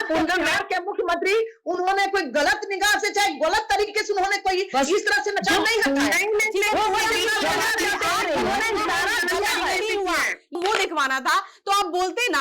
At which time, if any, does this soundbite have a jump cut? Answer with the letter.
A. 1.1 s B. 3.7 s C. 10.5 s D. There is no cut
C